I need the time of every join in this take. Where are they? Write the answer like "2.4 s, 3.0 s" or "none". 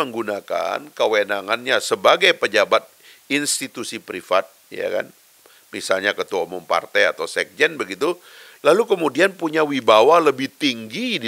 none